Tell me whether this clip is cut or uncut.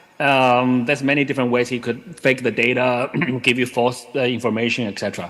uncut